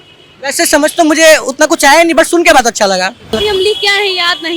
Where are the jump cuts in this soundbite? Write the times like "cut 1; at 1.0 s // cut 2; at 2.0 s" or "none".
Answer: cut 1; at 3.4 s